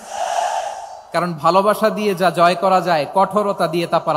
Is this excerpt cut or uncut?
uncut